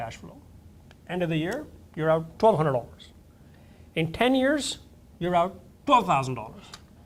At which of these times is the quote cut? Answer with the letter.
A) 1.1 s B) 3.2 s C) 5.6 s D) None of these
D